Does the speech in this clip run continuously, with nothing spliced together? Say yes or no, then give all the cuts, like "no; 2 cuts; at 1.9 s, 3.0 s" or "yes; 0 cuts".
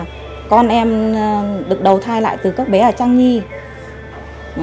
yes; 0 cuts